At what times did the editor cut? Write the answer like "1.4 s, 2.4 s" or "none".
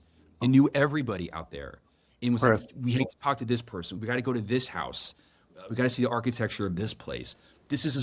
4.0 s